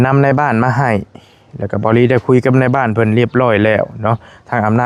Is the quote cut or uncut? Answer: uncut